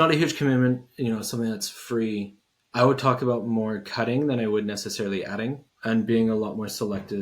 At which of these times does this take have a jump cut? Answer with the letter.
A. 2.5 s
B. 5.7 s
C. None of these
B